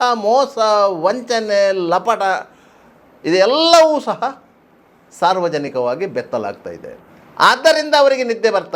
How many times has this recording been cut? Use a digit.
0